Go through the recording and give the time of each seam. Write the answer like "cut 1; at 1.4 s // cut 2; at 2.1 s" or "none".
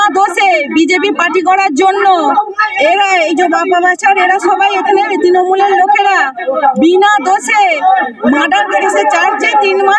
none

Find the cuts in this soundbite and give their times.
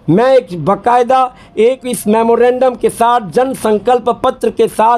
none

